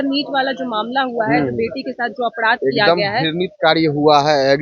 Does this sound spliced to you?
no; 0 cuts

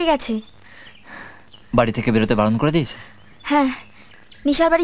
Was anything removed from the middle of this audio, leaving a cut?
no; 0 cuts

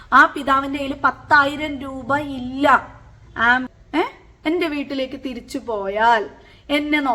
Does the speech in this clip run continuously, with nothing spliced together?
no; 1 cut; at 3.7 s

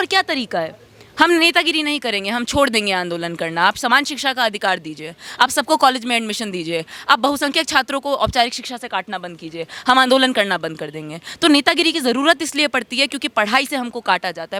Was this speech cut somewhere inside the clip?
no; 0 cuts

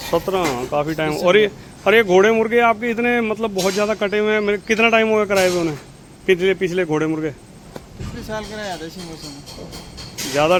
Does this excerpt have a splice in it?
no; 0 cuts

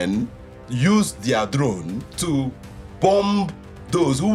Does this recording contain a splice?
no; 0 cuts

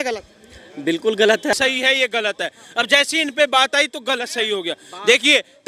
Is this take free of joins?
no; 1 cut; at 1.5 s

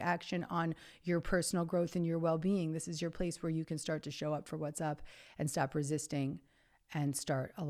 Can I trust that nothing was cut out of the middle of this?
yes; 0 cuts

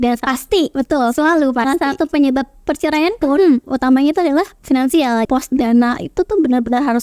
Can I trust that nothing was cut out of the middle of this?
no; 1 cut; at 5.3 s

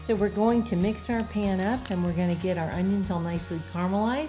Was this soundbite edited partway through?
no; 0 cuts

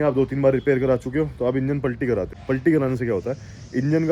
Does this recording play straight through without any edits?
no; 1 cut; at 2.3 s

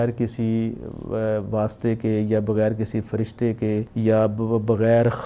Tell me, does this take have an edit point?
yes; 1 cut; at 3.9 s

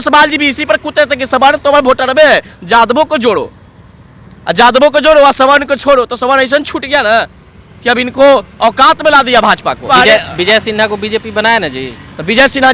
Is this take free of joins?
no; 1 cut; at 9.9 s

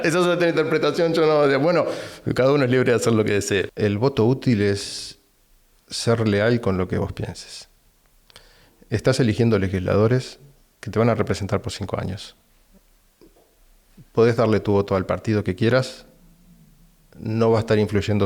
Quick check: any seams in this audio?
yes; 1 cut; at 3.7 s

